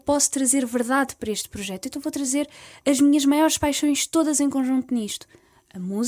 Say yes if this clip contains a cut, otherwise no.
no